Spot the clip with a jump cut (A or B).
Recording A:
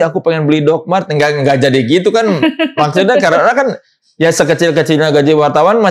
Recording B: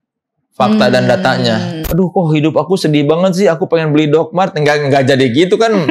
B